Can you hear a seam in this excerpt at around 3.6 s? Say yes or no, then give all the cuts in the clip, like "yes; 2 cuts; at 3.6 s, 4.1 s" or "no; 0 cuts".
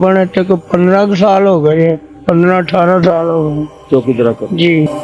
no; 1 cut; at 2.1 s